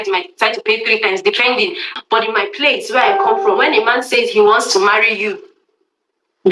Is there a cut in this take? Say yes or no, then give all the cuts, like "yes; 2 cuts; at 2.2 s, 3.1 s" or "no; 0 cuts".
yes; 1 cut; at 1.9 s